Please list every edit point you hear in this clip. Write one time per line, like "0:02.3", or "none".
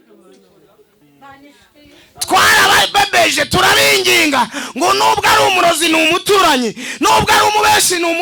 0:01.0